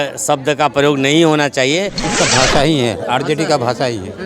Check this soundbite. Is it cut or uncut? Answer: cut